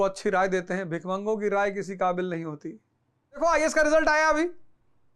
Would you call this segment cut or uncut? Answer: cut